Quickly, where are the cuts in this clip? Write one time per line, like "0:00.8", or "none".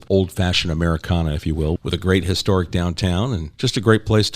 0:01.8
0:03.5

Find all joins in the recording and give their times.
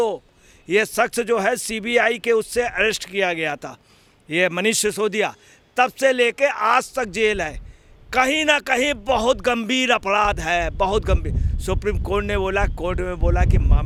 none

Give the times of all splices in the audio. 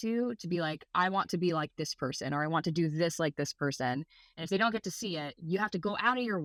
none

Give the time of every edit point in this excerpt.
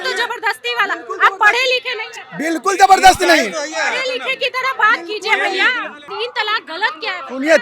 0:06.1

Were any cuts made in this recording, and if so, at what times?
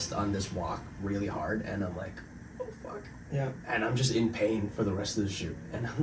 none

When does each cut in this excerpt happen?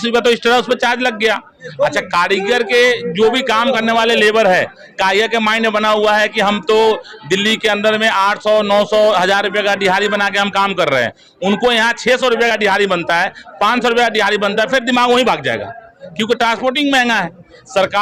none

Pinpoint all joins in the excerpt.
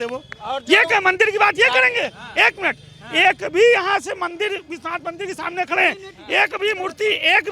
none

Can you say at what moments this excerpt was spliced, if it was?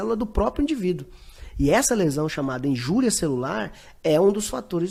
none

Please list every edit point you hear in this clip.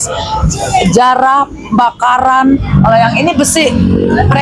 0:02.7

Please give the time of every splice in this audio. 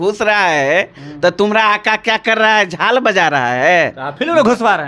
none

